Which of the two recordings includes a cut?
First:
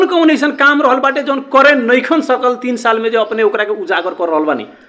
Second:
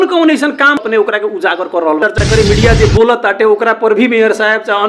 second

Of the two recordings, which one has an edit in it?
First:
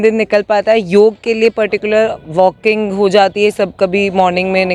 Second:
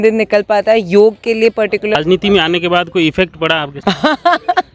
second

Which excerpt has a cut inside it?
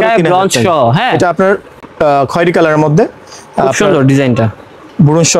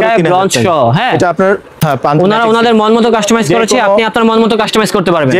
second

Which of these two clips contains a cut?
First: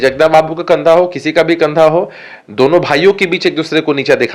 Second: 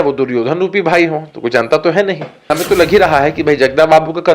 second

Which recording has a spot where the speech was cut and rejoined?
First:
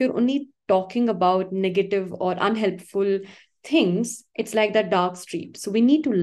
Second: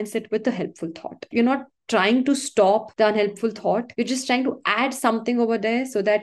second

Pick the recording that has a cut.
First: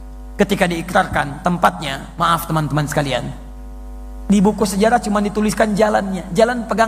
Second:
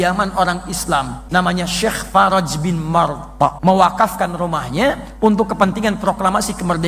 second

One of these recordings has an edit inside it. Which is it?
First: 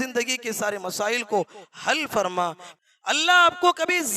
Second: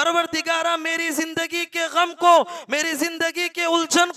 first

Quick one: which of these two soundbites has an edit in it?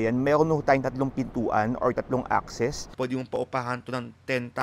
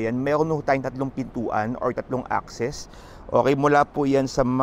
first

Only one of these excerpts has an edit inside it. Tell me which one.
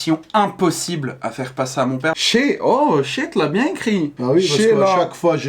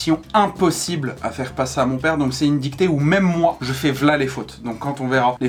first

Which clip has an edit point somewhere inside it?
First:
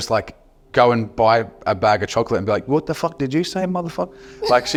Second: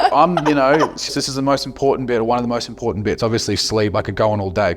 second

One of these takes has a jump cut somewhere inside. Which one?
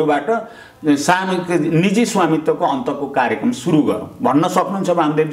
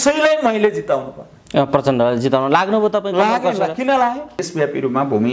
second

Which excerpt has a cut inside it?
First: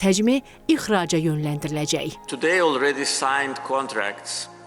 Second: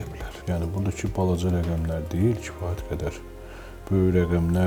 first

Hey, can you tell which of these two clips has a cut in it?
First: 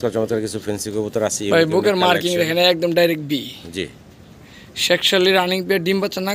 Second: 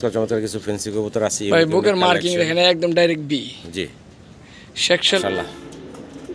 second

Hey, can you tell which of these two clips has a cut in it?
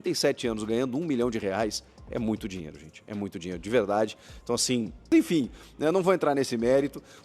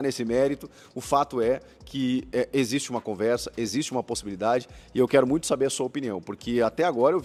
first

